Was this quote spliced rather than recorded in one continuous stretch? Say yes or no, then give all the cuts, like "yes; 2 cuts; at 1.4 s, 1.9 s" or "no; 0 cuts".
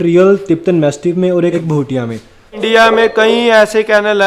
yes; 2 cuts; at 1.5 s, 2.6 s